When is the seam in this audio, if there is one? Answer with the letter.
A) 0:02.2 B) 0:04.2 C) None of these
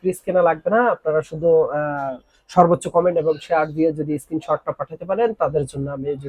C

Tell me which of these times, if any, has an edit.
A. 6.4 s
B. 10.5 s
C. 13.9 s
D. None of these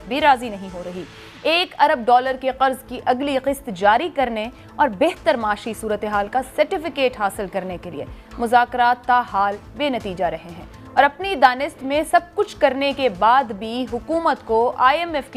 D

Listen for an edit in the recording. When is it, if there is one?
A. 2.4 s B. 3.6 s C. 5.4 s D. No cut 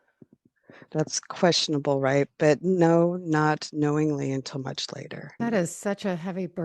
C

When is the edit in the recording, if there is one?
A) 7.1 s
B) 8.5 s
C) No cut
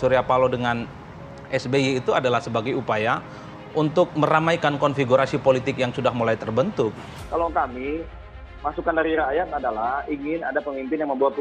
A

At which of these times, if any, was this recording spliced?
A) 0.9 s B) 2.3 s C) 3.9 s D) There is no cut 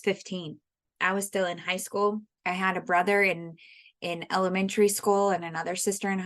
B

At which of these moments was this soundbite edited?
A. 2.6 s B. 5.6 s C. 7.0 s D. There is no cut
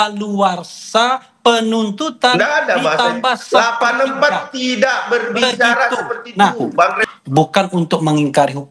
C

